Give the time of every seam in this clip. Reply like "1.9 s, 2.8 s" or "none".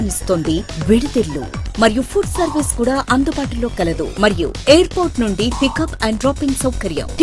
none